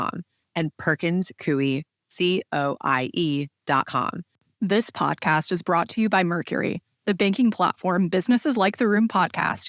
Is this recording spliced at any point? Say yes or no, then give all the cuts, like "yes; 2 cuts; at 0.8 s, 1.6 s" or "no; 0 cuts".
no; 0 cuts